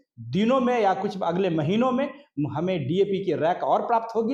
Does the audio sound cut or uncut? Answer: uncut